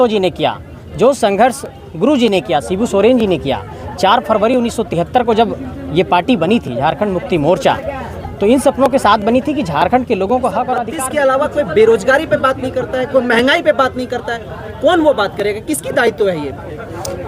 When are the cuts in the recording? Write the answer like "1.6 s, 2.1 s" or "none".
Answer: 10.9 s